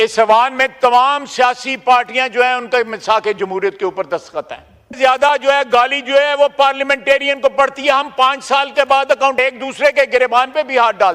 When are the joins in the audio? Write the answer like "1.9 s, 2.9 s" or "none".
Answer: 5.0 s, 9.4 s